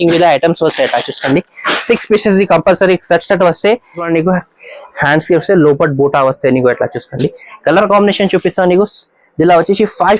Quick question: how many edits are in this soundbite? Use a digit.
1